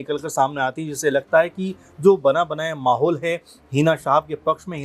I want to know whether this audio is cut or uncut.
uncut